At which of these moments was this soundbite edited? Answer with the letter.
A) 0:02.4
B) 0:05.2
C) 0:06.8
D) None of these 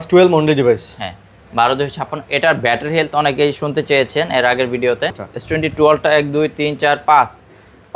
B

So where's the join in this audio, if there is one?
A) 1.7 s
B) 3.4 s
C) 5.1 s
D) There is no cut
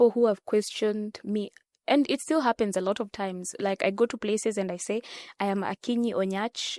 D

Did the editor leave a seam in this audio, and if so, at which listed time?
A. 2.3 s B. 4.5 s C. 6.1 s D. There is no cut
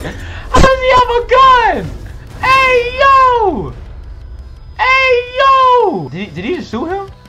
C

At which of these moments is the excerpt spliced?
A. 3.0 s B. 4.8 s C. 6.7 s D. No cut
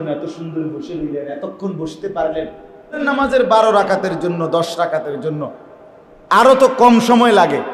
A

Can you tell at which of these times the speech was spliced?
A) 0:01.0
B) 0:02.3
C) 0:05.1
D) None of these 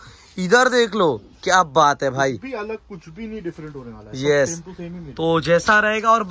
D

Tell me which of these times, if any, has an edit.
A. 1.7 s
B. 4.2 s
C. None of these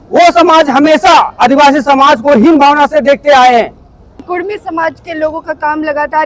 B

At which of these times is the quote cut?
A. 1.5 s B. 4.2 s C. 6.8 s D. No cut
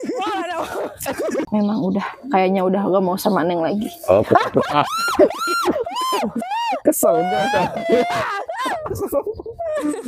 A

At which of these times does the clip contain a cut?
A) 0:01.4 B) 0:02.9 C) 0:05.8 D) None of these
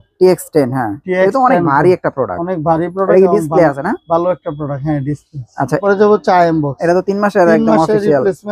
C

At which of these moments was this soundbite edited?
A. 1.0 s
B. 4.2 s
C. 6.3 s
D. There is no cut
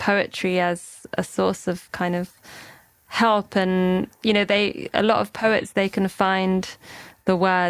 A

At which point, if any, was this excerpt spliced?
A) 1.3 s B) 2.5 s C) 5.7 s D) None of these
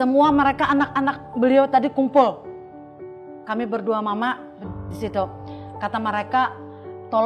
D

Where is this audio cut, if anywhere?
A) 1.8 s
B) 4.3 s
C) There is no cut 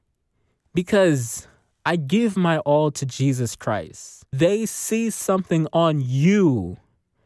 B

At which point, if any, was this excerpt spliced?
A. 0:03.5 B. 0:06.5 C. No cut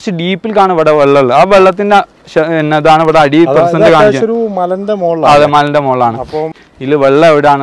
B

